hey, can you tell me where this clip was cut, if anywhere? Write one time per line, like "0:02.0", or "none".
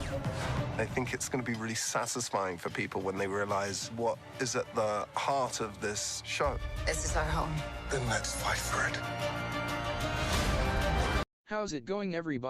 0:11.4